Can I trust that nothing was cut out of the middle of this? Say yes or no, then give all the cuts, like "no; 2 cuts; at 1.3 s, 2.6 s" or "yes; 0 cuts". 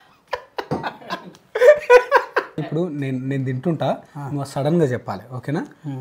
no; 1 cut; at 2.6 s